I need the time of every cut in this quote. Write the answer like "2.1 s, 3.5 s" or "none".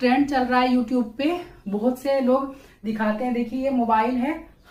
none